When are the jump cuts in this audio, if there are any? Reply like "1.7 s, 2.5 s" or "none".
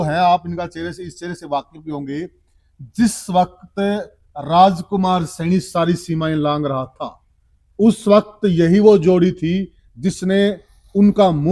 none